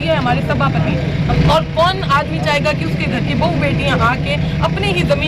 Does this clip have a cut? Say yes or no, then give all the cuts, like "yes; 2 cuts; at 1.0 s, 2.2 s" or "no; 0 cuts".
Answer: yes; 1 cut; at 1.3 s